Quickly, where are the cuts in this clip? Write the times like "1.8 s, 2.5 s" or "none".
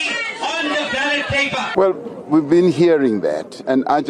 1.7 s

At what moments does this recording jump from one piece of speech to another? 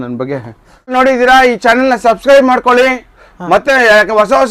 0.9 s

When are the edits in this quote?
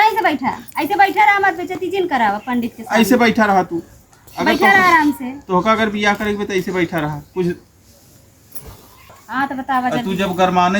9.2 s

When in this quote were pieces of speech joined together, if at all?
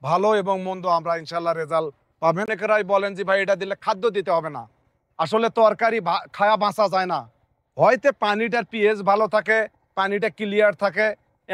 2.5 s

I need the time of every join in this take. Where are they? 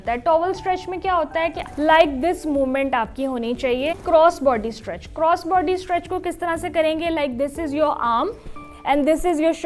1.6 s, 4.0 s

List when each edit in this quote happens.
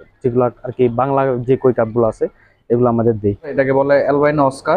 3.5 s

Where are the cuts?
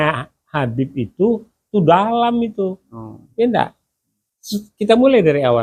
none

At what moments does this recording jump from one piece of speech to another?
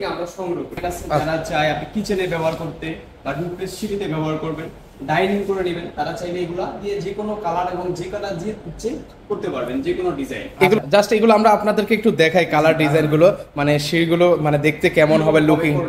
1.2 s, 10.8 s

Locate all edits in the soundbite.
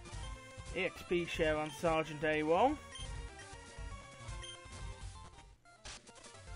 1.0 s

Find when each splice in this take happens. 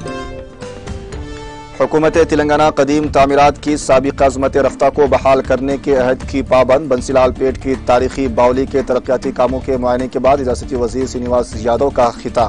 1.0 s

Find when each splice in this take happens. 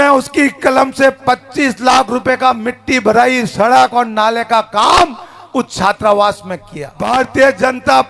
7.0 s

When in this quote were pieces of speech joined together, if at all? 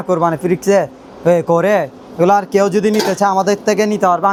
none

